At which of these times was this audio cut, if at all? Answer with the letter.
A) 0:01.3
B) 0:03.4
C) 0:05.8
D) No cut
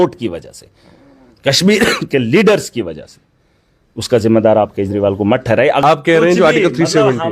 C